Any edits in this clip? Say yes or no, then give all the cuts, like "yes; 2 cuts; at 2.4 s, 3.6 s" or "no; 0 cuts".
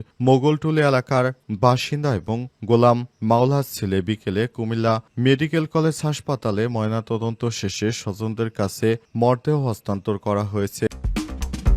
yes; 1 cut; at 10.9 s